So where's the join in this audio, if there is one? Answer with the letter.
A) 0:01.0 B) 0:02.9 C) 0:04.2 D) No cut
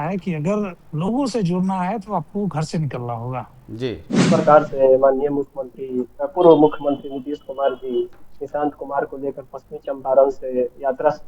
C